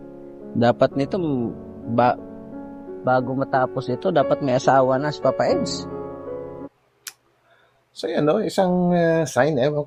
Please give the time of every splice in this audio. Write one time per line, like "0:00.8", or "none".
none